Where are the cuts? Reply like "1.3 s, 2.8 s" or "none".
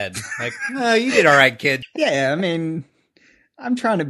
1.9 s